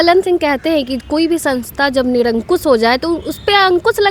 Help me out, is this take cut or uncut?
uncut